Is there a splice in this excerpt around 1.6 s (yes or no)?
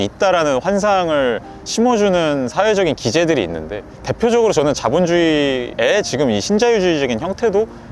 no